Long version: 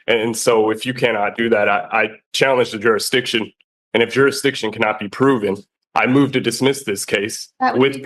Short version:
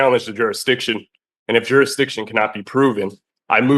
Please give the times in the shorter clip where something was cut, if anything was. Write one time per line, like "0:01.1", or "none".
none